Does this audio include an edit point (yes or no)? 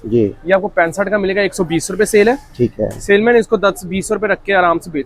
no